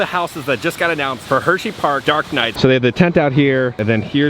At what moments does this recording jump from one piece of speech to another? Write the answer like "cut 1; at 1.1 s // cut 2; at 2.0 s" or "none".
cut 1; at 2.5 s